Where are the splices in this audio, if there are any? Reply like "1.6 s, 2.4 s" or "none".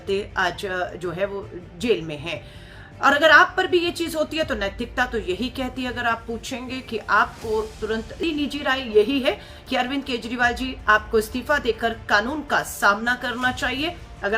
8.2 s